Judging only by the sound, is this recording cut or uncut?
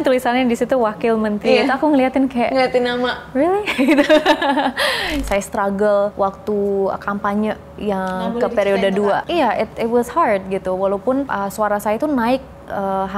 cut